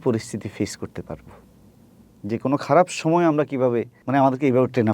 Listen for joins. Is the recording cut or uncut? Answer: cut